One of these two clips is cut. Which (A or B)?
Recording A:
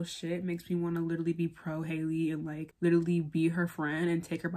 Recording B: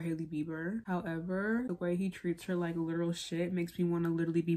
B